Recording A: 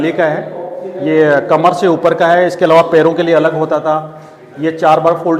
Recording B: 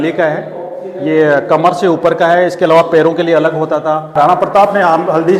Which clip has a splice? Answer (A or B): B